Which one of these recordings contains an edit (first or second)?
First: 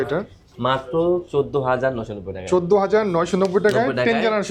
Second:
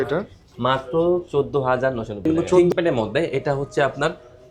second